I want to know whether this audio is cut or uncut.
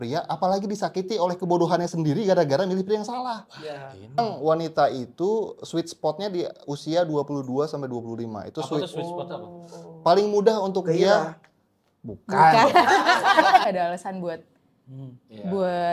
cut